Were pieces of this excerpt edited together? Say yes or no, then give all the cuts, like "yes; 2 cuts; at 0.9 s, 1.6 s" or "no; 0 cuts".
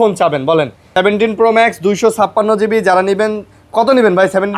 yes; 1 cut; at 0.9 s